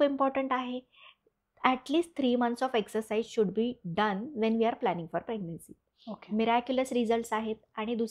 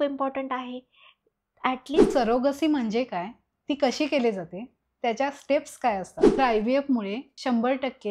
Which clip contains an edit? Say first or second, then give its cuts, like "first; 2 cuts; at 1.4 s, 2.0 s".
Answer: second; 2 cuts; at 2.0 s, 6.2 s